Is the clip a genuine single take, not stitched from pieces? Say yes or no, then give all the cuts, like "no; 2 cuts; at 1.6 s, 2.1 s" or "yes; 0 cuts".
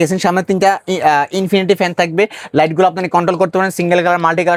yes; 0 cuts